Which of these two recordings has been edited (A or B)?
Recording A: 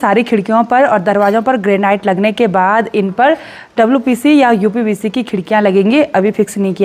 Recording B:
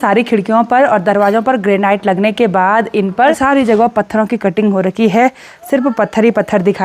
B